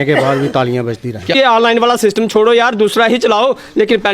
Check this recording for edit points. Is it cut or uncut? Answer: cut